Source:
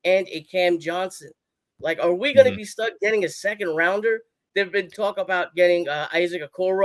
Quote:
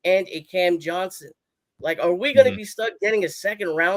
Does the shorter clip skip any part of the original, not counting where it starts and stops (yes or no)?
no